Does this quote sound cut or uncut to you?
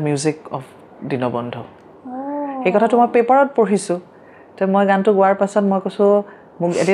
uncut